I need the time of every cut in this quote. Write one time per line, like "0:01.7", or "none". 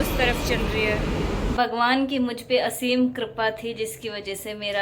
0:01.5